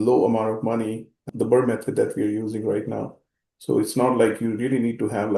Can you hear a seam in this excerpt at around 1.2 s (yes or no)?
yes